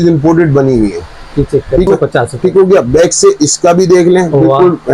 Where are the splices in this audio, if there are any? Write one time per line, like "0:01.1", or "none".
0:01.9